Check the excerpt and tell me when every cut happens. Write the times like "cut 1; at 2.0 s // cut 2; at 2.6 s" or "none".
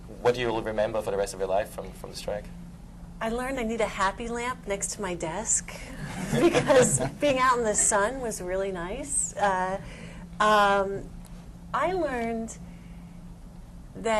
cut 1; at 2.3 s